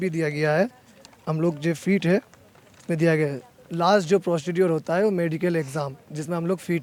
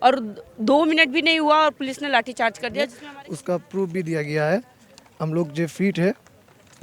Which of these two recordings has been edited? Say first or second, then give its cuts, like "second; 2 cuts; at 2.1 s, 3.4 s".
second; 1 cut; at 3.0 s